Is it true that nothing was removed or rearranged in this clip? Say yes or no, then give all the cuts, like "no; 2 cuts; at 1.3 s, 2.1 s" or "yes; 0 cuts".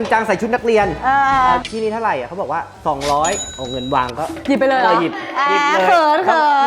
yes; 0 cuts